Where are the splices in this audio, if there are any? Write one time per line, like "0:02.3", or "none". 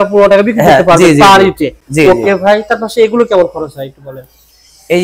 none